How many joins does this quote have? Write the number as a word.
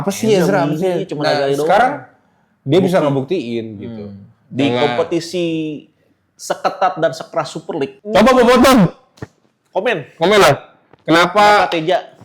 one